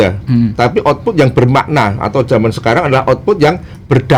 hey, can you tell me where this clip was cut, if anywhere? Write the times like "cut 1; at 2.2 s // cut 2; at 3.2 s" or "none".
none

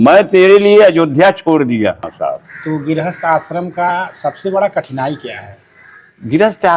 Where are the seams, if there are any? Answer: cut 1; at 2.1 s

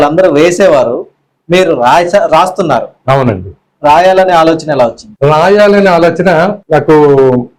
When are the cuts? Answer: none

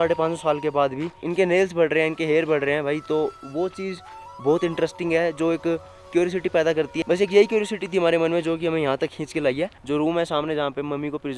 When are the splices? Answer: cut 1; at 9.8 s

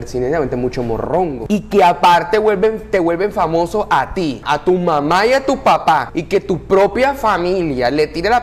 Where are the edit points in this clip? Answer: cut 1; at 1.4 s // cut 2; at 4.4 s // cut 3; at 6.1 s

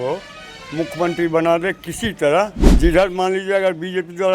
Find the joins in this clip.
cut 1; at 2.6 s

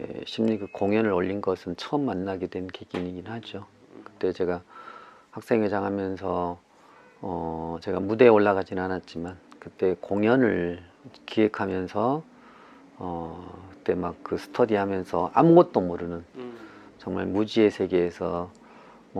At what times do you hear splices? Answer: none

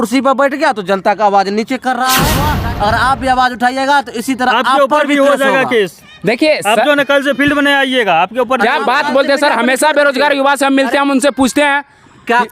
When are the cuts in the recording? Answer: cut 1; at 2.5 s

